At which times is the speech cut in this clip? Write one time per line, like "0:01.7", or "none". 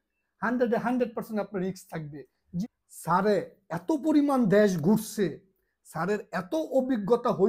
0:02.6